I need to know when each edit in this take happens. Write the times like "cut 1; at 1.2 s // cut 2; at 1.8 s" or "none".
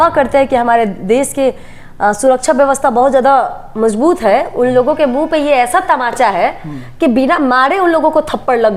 none